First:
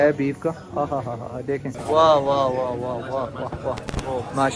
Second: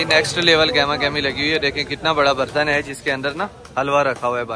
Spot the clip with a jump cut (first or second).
first